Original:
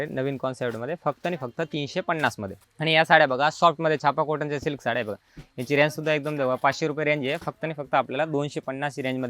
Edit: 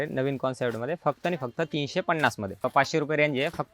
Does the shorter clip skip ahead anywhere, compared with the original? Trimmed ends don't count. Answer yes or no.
yes